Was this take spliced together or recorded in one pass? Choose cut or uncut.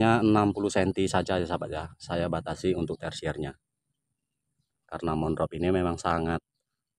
cut